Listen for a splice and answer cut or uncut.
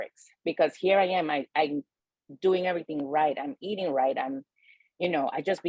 uncut